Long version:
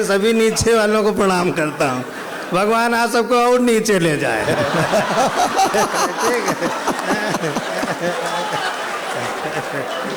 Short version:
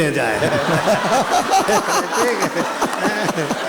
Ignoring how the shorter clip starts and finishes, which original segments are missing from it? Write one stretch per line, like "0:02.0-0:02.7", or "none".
none

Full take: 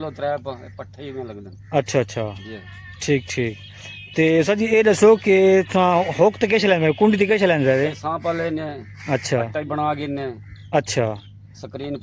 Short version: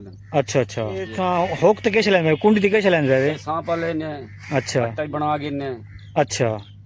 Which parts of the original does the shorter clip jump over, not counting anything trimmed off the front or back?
0:02.5-0:05.7

